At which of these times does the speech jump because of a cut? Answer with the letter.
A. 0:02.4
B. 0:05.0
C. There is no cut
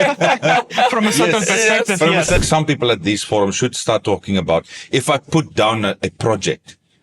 A